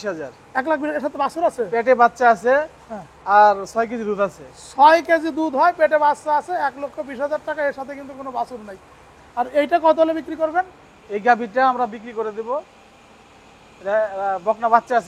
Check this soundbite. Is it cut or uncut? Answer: uncut